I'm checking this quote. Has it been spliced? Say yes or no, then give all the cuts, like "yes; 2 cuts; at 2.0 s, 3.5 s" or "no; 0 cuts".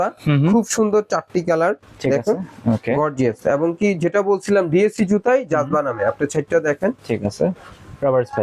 no; 0 cuts